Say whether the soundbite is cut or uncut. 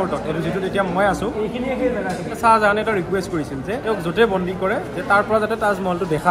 cut